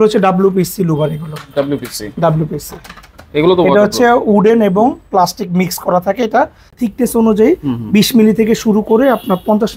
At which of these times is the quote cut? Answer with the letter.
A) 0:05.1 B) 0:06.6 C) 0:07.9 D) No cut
B